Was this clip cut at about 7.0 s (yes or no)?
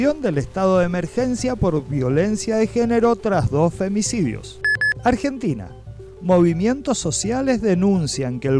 no